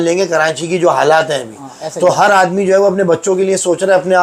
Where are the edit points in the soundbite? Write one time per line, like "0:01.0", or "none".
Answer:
none